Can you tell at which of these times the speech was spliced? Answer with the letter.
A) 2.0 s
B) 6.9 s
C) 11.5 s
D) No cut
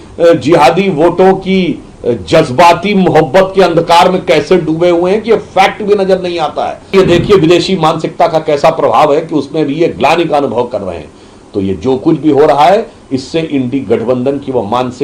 B